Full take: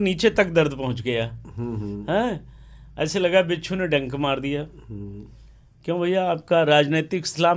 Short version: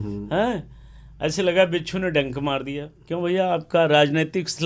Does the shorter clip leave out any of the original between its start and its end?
yes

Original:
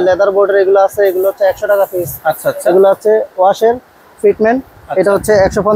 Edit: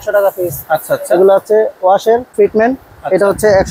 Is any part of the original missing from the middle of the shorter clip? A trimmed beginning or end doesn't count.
yes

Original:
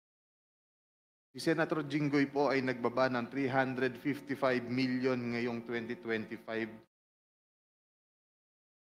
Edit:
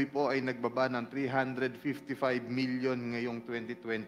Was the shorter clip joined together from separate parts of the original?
no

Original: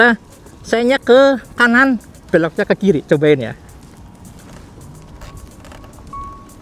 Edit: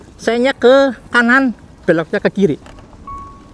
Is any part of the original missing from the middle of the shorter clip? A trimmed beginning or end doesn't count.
yes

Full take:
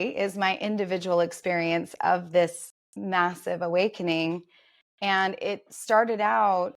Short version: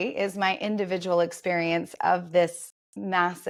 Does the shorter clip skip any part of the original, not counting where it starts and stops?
no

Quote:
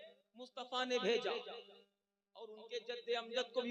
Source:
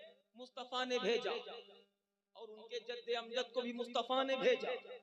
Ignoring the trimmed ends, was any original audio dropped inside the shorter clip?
no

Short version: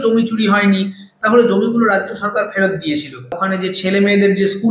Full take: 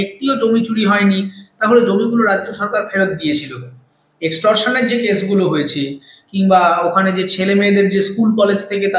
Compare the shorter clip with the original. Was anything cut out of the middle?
yes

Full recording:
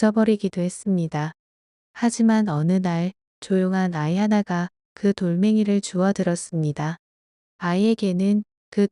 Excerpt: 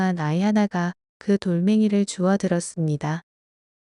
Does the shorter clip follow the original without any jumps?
yes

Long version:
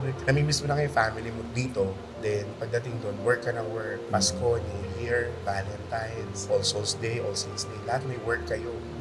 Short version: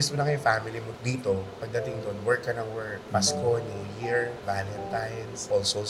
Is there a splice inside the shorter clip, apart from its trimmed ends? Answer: yes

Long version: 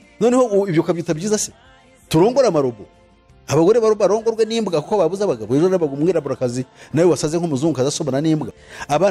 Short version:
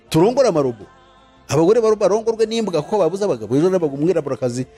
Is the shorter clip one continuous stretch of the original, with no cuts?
yes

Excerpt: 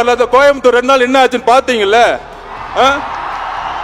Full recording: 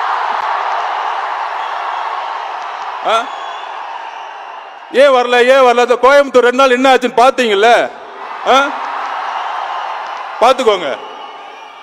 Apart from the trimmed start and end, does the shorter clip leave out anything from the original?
no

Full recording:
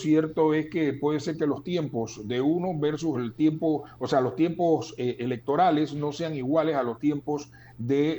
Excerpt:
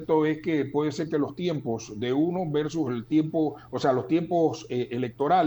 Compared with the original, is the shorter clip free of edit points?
yes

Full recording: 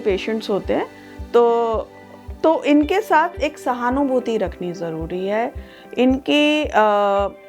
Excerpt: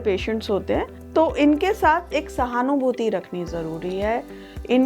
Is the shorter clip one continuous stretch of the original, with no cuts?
no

